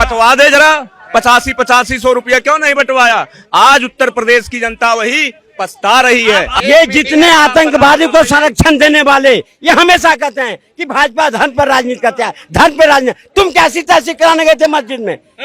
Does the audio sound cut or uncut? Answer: cut